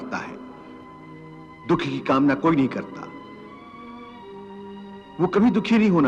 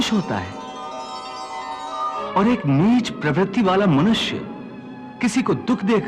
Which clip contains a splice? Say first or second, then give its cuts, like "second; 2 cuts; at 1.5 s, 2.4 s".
second; 1 cut; at 2.2 s